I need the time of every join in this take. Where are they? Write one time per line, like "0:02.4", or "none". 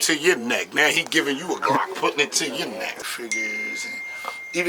0:03.1